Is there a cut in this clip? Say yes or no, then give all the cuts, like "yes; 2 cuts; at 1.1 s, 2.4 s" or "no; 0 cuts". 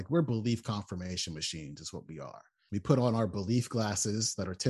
yes; 1 cut; at 2.6 s